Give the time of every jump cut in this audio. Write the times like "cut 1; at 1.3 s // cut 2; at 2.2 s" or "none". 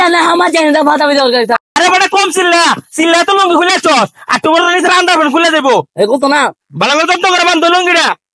none